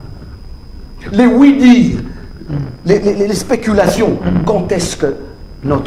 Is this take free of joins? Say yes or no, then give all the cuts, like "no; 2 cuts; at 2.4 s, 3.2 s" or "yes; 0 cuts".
yes; 0 cuts